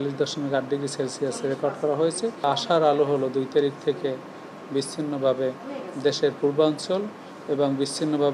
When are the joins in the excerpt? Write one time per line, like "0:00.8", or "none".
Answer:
none